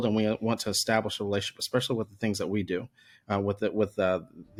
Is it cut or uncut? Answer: uncut